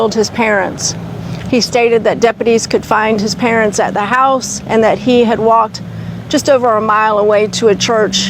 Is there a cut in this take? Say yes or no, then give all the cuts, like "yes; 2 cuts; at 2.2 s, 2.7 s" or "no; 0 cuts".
no; 0 cuts